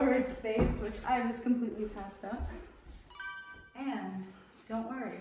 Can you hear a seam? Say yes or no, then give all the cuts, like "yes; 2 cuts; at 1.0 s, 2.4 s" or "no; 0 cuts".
no; 0 cuts